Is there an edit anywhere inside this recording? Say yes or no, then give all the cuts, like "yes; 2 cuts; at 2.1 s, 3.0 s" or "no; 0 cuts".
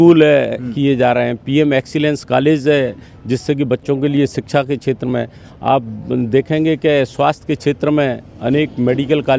no; 0 cuts